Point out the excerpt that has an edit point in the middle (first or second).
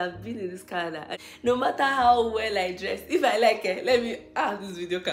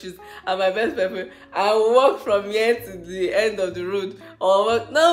first